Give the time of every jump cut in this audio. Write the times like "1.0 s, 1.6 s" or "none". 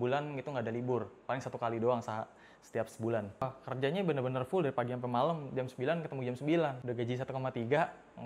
3.4 s, 6.8 s